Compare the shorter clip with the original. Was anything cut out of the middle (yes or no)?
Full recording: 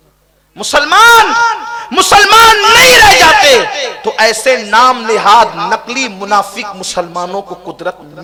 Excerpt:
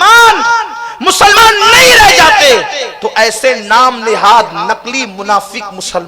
yes